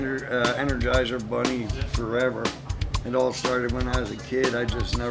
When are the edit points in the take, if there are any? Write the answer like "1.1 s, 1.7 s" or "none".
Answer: none